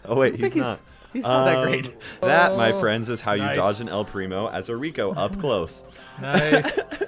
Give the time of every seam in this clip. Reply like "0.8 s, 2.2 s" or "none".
2.2 s